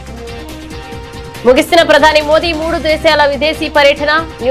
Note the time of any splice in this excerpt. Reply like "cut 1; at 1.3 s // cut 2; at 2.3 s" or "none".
cut 1; at 1.2 s